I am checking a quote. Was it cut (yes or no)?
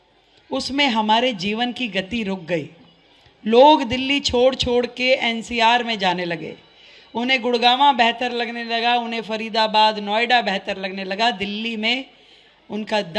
no